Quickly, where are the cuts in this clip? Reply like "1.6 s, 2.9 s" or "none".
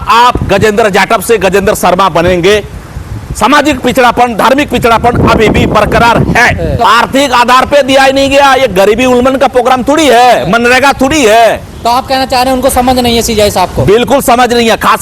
6.7 s, 11.7 s